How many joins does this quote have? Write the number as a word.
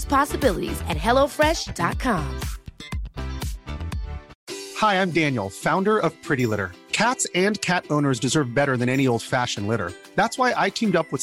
one